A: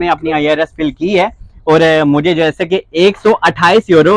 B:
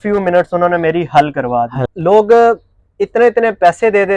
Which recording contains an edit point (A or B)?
B